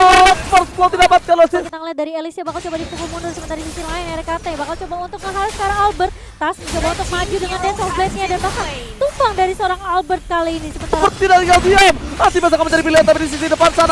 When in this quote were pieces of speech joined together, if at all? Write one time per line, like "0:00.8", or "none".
0:01.8
0:11.0